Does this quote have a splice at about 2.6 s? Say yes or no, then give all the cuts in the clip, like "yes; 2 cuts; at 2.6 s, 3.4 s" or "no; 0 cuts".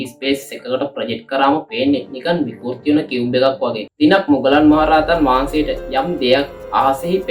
no; 1 cut; at 3.9 s